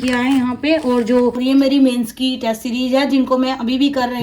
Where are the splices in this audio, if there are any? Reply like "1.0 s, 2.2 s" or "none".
1.4 s